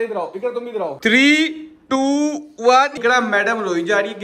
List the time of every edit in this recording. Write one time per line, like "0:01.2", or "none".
0:00.9
0:03.0